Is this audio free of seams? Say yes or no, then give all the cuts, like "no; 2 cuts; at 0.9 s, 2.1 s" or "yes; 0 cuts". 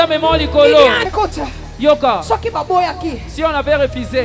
no; 1 cut; at 1.0 s